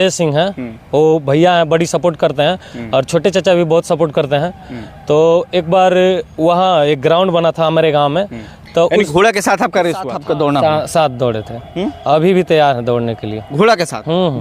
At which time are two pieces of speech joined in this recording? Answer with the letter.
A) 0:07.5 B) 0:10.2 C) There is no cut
B